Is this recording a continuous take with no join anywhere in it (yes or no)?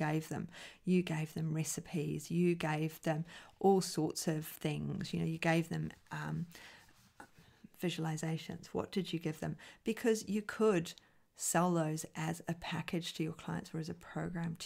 yes